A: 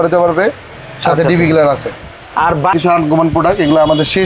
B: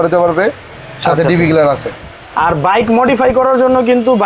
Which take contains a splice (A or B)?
A